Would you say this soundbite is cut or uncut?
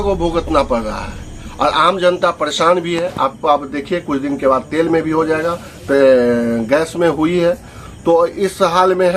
uncut